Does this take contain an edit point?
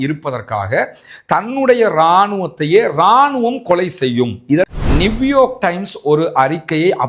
yes; 1 cut; at 4.8 s

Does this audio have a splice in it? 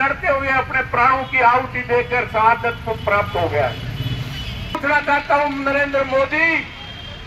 yes; 1 cut; at 4.8 s

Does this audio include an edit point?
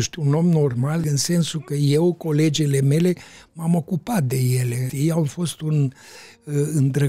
yes; 2 cuts; at 1.1 s, 4.9 s

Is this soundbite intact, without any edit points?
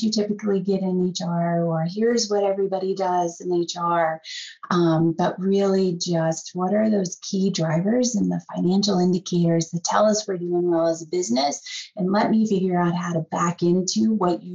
yes; 0 cuts

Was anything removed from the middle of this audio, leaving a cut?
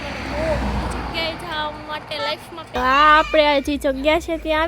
yes; 1 cut; at 2.7 s

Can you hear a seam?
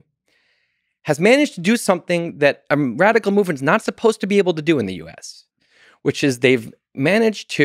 no; 0 cuts

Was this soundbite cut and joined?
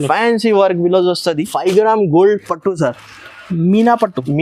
yes; 1 cut; at 1.5 s

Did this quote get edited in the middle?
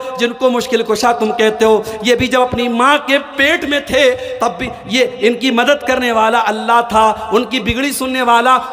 no; 0 cuts

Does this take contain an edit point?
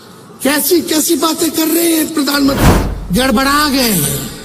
yes; 1 cut; at 2.7 s

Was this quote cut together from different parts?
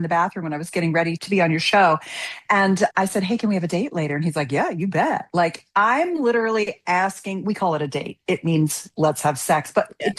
no; 0 cuts

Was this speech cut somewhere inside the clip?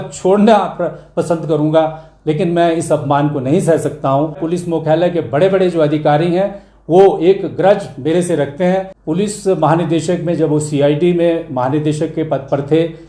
yes; 2 cuts; at 4.5 s, 9.0 s

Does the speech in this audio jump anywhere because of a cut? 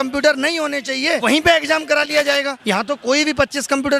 yes; 2 cuts; at 1.2 s, 2.5 s

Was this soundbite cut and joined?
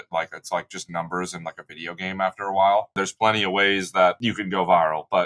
yes; 2 cuts; at 3.1 s, 4.2 s

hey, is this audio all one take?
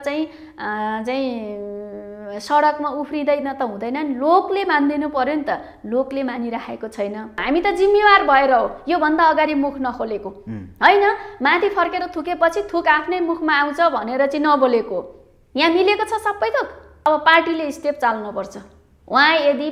no; 2 cuts; at 7.4 s, 17.0 s

